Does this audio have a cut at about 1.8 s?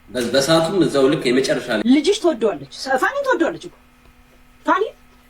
yes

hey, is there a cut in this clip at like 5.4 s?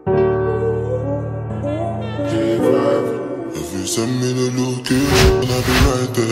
yes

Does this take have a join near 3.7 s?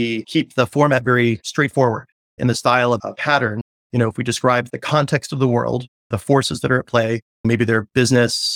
yes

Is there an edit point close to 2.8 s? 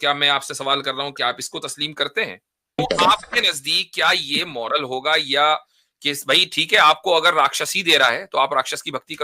yes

